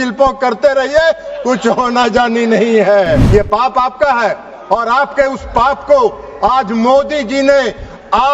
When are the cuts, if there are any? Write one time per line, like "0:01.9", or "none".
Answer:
0:03.2